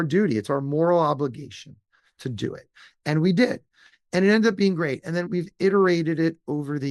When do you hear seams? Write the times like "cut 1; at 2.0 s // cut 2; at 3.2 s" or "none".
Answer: none